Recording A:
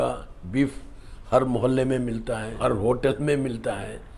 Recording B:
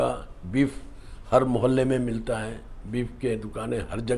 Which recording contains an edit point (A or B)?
A